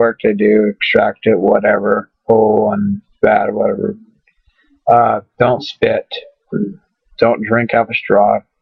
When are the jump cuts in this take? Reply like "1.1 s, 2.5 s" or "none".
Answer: none

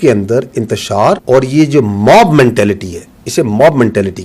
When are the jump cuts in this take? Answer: 1.2 s

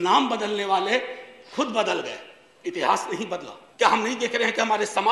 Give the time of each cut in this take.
3.6 s

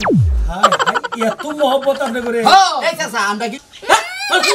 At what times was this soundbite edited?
3.6 s

